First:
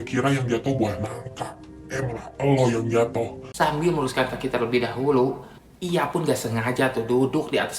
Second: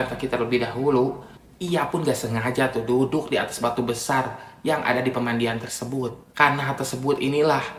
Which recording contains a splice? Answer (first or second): first